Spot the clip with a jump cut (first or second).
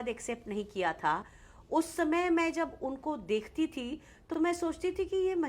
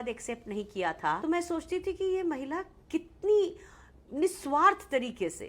second